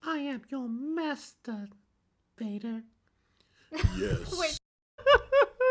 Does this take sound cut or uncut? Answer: cut